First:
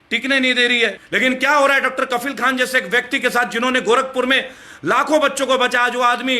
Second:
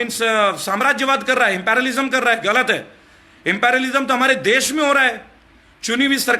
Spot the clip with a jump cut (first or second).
first